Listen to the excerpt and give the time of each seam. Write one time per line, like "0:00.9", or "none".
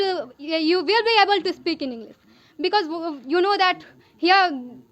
none